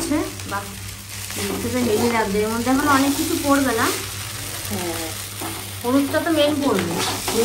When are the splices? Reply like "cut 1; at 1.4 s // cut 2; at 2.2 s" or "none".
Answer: none